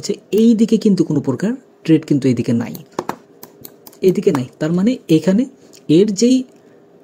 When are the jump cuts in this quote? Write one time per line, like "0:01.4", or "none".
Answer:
none